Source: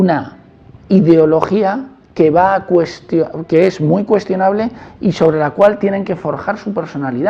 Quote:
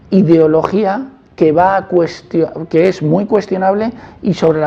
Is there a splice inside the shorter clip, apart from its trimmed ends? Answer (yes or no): no